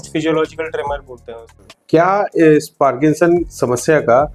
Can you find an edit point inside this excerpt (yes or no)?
yes